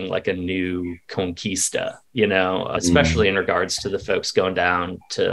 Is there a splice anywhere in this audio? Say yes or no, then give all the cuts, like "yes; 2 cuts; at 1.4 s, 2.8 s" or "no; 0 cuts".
yes; 1 cut; at 2.7 s